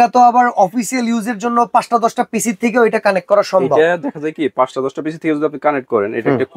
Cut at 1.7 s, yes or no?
no